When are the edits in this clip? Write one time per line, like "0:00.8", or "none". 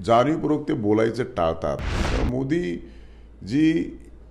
0:02.0